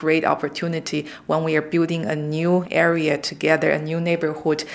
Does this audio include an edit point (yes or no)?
no